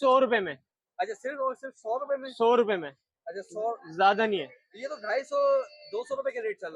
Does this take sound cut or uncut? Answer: uncut